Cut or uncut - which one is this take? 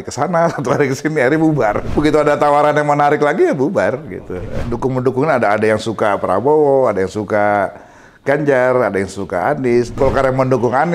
cut